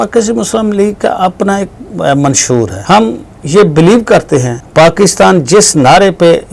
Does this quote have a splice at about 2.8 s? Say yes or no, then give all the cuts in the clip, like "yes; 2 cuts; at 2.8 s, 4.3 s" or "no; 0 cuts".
yes; 2 cuts; at 2.8 s, 4.6 s